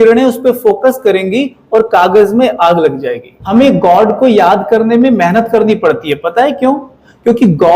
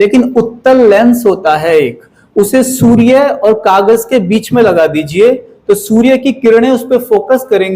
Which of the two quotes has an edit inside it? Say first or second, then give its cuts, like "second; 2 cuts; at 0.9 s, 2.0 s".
first; 1 cut; at 3.3 s